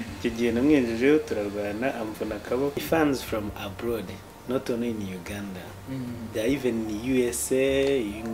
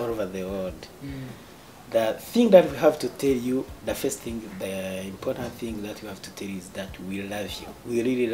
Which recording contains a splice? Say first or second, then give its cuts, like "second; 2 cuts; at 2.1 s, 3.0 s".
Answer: first; 1 cut; at 2.8 s